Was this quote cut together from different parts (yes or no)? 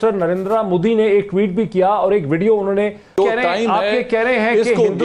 yes